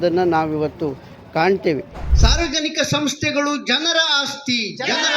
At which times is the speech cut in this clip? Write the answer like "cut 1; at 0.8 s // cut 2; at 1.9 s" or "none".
cut 1; at 2.0 s